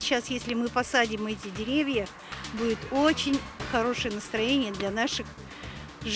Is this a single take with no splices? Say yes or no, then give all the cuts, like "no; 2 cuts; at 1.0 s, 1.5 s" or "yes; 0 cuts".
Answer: yes; 0 cuts